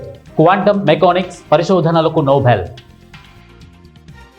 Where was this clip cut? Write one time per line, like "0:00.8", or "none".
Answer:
0:02.8